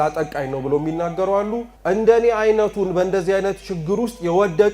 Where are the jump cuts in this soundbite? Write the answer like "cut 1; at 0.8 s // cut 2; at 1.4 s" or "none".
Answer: cut 1; at 1.7 s

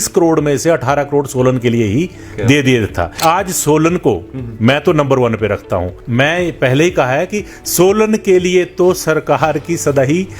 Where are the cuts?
cut 1; at 3.2 s // cut 2; at 6.0 s

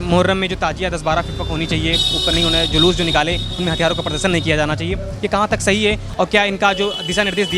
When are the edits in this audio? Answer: none

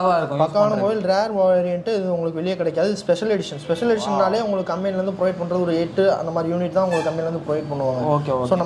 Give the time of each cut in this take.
none

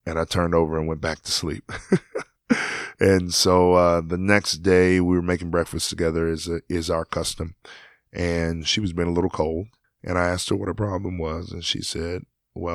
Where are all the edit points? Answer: none

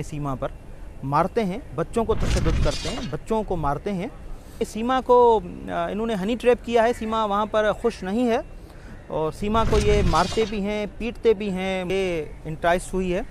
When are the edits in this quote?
cut 1; at 4.7 s // cut 2; at 11.9 s

